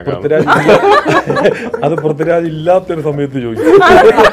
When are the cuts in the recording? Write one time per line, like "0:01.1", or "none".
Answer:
none